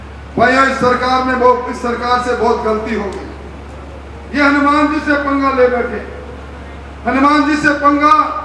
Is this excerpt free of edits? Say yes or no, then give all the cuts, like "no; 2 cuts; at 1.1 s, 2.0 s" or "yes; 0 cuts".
yes; 0 cuts